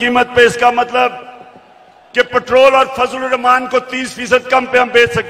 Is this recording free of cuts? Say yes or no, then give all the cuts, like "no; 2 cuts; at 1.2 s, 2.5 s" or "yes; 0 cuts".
yes; 0 cuts